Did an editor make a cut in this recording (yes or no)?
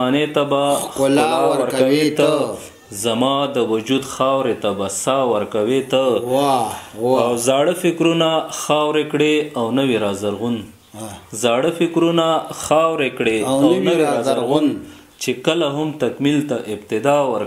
no